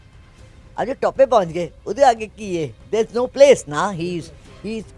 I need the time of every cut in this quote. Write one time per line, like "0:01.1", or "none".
0:02.8

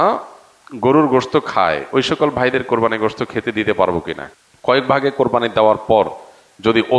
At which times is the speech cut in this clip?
0:04.2

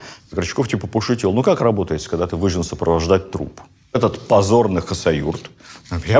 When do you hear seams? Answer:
0:04.0

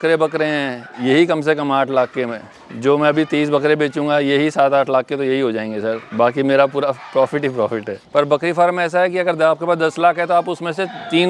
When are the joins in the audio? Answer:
0:08.0

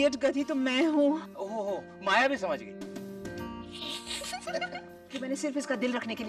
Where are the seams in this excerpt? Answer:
0:04.4

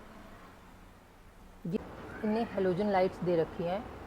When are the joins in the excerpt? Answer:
0:01.8

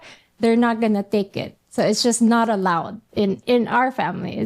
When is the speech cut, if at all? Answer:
0:03.0

